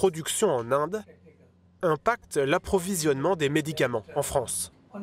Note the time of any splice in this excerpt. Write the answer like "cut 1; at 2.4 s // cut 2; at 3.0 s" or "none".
none